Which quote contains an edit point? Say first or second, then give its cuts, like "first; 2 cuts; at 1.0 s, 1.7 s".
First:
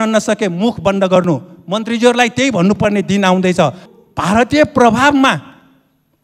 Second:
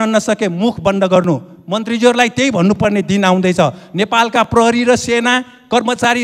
first; 1 cut; at 3.8 s